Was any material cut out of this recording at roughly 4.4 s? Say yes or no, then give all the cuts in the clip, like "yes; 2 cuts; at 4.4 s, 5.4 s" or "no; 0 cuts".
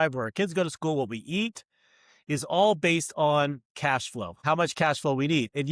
yes; 1 cut; at 4.4 s